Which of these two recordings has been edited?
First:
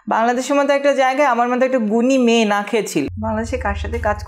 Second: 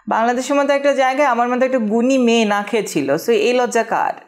first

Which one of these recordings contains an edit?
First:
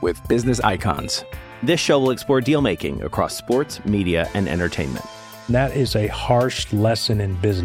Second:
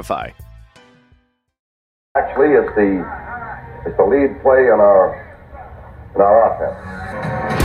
second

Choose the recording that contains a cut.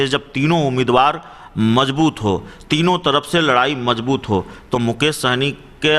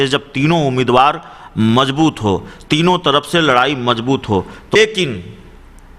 second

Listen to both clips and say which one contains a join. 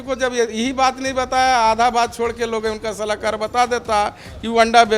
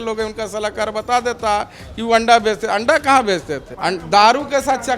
second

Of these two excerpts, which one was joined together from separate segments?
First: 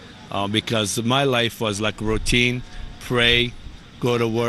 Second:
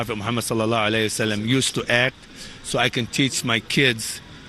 first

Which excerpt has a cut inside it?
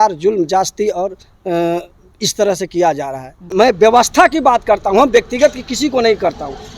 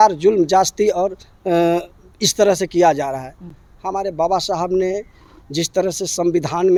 first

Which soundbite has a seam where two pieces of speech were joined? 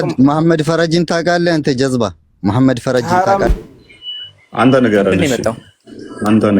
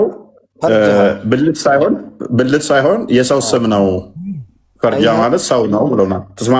first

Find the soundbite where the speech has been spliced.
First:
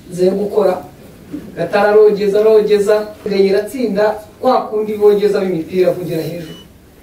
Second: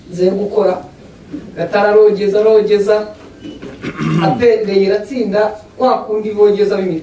first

